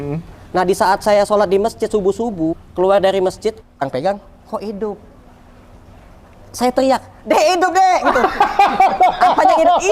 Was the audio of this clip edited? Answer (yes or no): yes